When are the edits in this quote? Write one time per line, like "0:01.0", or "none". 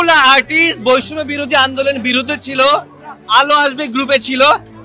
none

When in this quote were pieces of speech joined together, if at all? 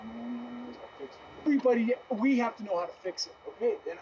0:01.5

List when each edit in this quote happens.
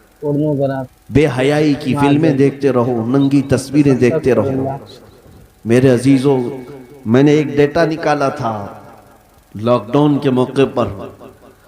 0:00.9

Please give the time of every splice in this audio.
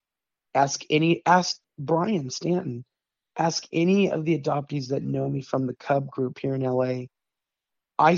0:01.6

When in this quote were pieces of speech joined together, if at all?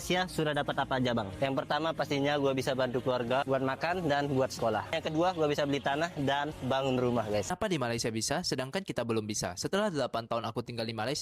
0:07.5

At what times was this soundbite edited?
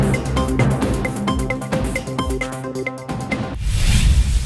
0:03.6

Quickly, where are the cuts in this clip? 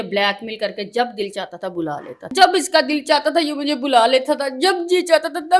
0:02.2

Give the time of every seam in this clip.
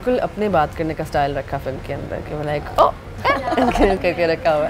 none

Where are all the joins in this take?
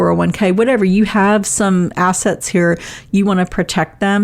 none

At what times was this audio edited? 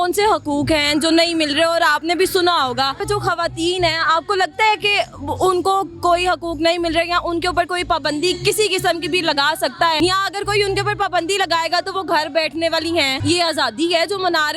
0:03.0
0:10.0
0:13.1

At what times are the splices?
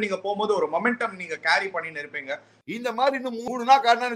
0:02.5

